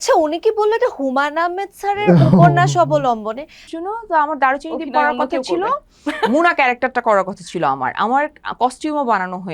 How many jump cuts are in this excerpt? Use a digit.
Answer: 1